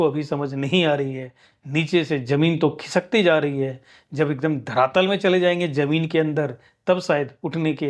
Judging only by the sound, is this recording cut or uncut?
uncut